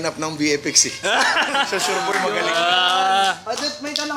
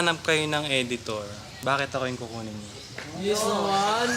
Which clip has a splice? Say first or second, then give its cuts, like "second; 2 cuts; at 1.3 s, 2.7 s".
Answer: second; 1 cut; at 1.4 s